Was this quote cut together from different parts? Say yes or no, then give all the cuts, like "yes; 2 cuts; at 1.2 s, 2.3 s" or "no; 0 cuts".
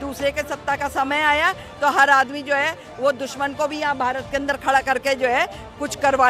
no; 0 cuts